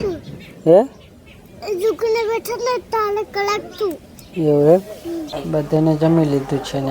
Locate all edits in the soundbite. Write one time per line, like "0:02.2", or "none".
0:05.3